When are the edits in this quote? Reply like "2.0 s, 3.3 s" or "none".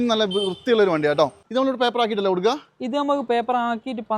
1.4 s